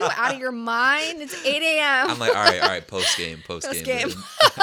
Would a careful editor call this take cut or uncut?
uncut